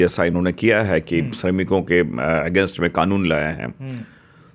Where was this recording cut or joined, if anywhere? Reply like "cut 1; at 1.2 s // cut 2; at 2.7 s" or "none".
none